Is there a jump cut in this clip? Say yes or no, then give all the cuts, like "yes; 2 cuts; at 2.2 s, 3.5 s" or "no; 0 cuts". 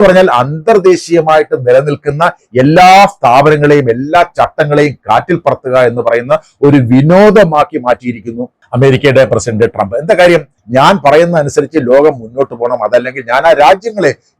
yes; 1 cut; at 10.6 s